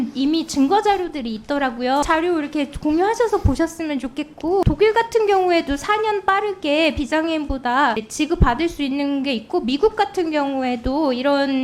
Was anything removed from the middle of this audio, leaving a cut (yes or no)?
yes